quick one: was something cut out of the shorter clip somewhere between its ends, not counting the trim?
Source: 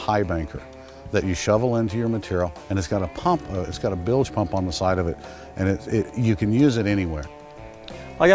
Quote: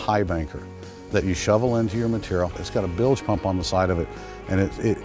yes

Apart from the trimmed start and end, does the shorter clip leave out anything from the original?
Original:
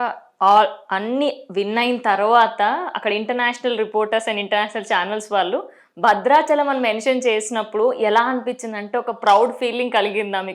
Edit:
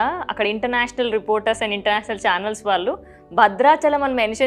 no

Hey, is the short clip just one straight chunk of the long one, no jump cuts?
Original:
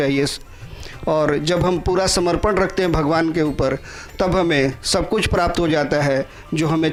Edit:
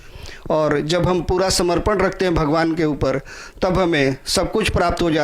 yes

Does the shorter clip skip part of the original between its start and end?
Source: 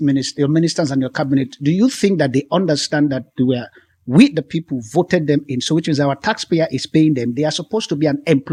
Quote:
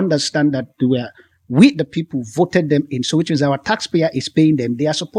no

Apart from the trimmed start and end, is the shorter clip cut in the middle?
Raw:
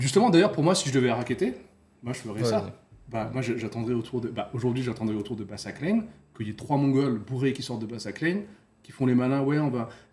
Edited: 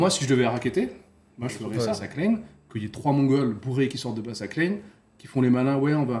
yes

